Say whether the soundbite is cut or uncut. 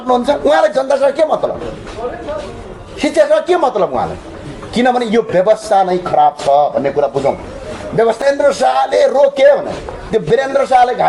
cut